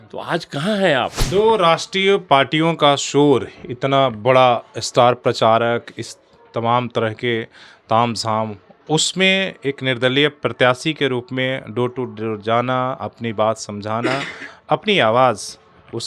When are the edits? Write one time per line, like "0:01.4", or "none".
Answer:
0:01.2